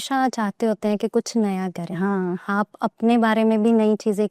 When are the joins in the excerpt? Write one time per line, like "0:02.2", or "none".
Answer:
none